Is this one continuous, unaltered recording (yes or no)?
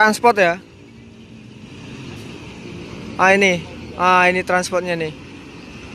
yes